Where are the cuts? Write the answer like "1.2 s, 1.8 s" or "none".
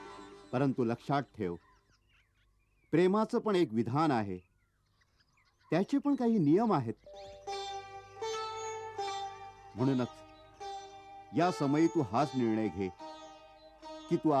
7.3 s